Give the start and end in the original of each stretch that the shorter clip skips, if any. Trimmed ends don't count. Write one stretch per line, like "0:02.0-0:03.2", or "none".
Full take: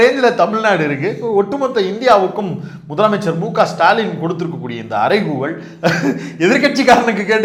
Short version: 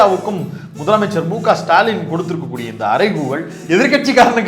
0:05.7-0:06.3